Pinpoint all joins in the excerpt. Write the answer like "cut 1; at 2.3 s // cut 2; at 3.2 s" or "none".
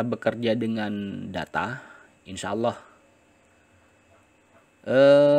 none

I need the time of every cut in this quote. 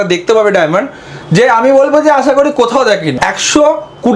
cut 1; at 3.2 s

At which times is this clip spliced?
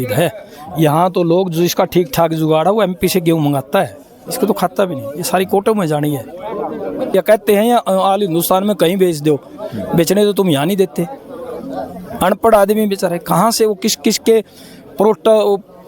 cut 1; at 7.1 s

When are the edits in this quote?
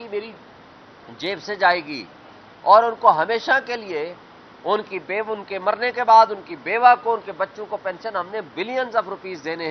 none

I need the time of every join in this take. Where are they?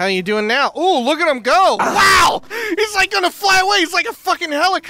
cut 1; at 2.5 s

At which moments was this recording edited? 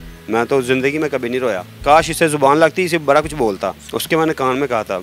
cut 1; at 1.7 s // cut 2; at 3.9 s

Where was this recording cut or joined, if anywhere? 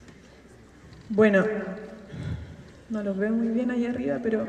none

